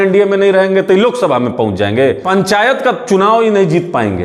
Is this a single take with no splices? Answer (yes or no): no